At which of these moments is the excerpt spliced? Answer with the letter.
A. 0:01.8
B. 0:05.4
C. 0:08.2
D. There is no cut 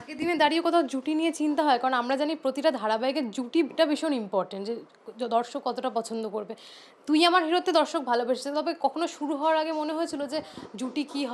D